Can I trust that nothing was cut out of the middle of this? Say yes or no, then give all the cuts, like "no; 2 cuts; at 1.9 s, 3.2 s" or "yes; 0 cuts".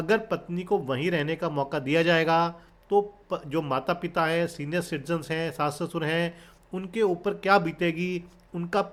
yes; 0 cuts